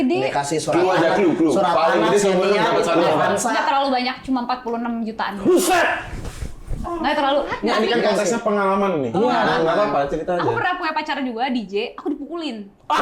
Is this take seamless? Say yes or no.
no